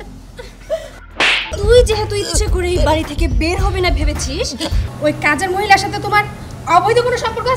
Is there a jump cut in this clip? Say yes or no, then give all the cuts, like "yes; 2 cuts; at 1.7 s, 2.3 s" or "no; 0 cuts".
yes; 2 cuts; at 1.5 s, 4.8 s